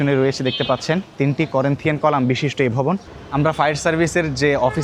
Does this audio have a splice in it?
yes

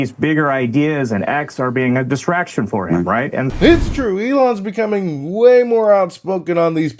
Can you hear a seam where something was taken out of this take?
no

